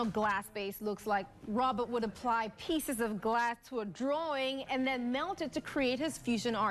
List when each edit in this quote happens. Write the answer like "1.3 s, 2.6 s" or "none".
none